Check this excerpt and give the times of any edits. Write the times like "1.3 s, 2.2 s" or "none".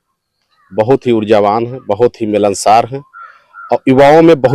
none